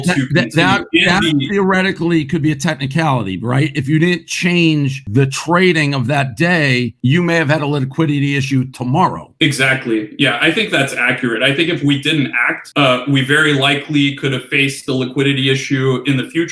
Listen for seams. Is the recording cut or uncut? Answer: uncut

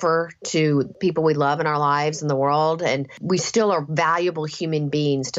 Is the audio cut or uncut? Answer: cut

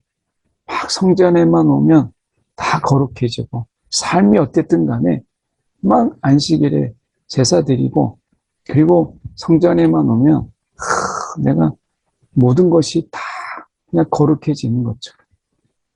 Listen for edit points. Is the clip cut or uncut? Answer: uncut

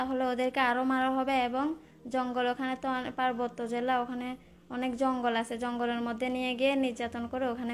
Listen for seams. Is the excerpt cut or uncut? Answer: uncut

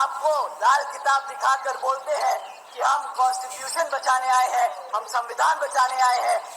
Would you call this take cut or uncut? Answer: uncut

